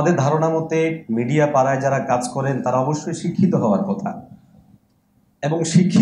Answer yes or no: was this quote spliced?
no